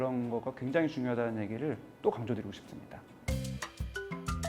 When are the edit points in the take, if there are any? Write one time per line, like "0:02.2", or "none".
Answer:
0:03.1